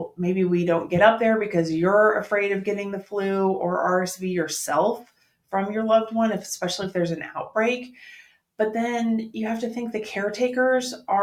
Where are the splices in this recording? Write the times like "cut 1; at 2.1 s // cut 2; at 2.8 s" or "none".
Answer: none